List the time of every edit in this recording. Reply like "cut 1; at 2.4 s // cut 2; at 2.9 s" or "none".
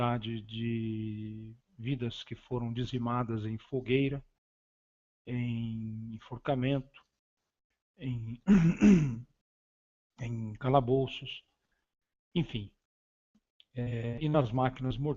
cut 1; at 12.2 s